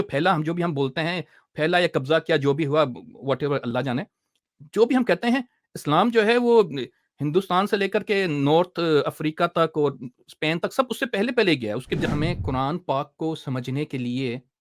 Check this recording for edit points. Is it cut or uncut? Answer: cut